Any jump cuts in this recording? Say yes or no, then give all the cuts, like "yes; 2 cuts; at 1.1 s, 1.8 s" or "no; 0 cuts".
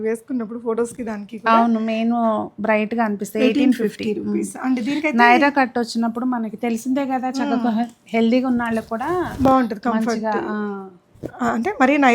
no; 0 cuts